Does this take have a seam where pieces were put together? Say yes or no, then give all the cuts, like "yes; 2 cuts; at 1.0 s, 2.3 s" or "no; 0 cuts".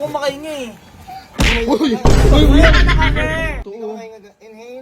yes; 1 cut; at 3.6 s